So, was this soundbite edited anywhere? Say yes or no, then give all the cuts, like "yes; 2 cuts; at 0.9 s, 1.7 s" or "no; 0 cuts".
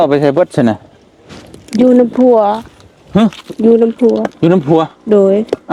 no; 0 cuts